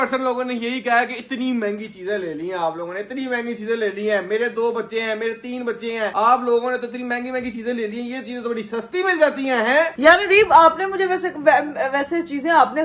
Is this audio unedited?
yes; 0 cuts

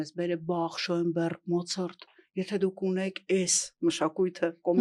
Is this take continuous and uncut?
yes; 0 cuts

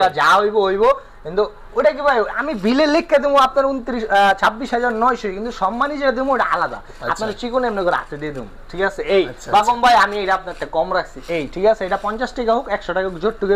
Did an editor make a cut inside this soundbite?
no; 0 cuts

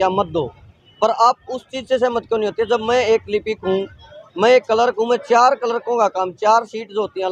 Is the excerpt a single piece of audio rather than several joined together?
yes; 0 cuts

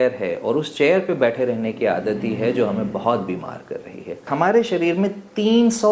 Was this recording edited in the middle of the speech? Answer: yes; 1 cut; at 4.3 s

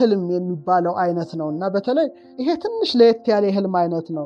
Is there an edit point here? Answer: yes; 1 cut; at 2.3 s

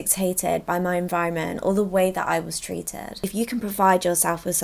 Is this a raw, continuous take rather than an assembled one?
no; 1 cut; at 3.2 s

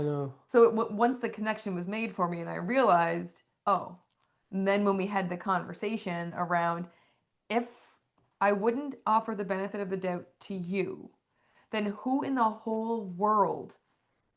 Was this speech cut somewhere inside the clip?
yes; 1 cut; at 3.4 s

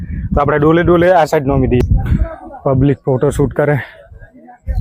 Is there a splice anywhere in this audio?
yes; 1 cut; at 1.8 s

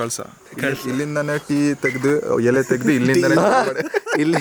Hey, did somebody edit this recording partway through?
no; 0 cuts

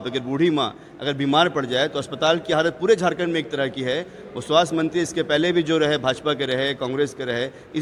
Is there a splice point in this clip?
no; 0 cuts

